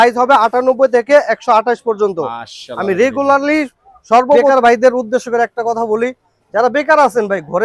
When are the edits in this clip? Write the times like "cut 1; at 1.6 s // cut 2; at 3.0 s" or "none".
cut 1; at 4.4 s

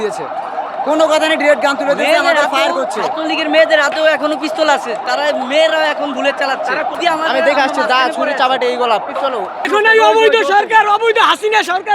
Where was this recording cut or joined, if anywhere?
cut 1; at 6.9 s // cut 2; at 9.7 s

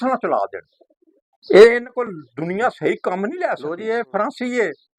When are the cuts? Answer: cut 1; at 3.6 s

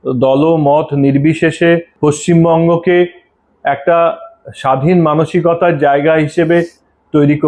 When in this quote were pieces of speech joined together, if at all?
cut 1; at 1.9 s

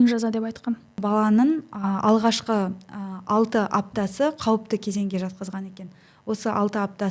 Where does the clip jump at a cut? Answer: cut 1; at 1.0 s

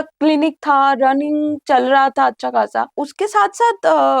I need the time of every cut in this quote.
cut 1; at 3.0 s

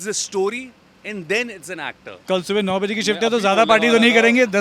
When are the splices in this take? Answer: cut 1; at 2.2 s

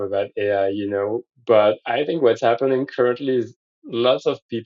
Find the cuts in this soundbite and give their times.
cut 1; at 1.2 s

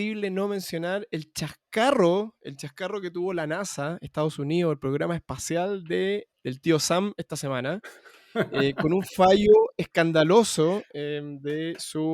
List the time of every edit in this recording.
cut 1; at 6.3 s

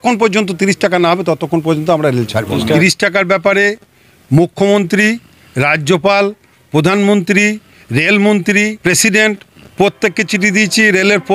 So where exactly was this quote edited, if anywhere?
cut 1; at 2.8 s // cut 2; at 8.8 s

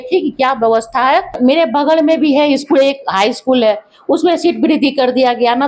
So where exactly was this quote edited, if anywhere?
cut 1; at 1.3 s

